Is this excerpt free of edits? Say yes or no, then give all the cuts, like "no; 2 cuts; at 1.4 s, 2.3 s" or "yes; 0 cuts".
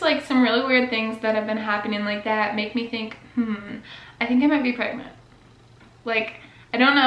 yes; 0 cuts